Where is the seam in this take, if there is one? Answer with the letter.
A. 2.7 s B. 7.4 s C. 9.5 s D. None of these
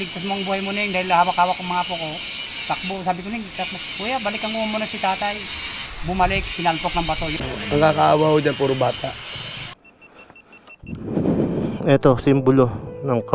B